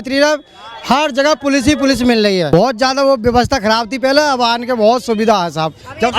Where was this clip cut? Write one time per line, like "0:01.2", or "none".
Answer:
0:02.5